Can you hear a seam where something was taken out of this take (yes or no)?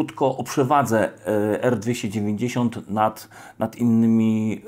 no